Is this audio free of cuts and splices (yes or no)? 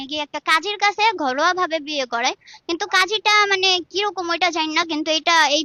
yes